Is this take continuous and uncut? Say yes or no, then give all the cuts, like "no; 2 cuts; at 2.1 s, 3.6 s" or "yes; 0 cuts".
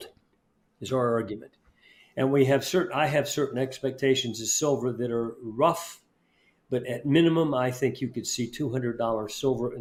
yes; 0 cuts